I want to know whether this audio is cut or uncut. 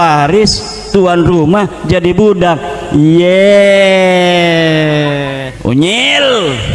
cut